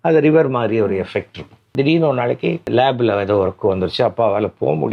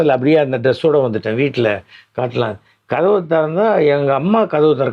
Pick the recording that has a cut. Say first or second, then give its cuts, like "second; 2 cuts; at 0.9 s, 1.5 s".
first; 2 cuts; at 1.7 s, 2.7 s